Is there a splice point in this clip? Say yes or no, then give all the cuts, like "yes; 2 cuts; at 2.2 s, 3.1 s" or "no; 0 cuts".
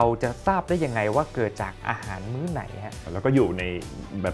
yes; 1 cut; at 3.1 s